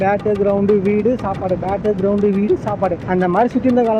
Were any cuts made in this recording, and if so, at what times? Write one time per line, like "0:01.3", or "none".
0:03.0